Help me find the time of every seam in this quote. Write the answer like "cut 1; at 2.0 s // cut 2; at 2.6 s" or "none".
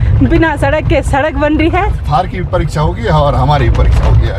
cut 1; at 2.0 s